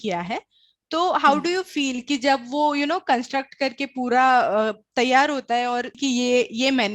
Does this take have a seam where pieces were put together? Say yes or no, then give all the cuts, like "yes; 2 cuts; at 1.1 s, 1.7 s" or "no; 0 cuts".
yes; 1 cut; at 5.9 s